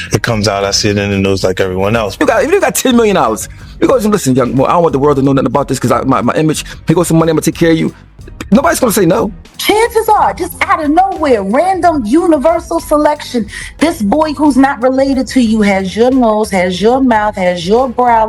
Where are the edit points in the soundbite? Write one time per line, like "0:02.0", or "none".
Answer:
0:02.2
0:09.5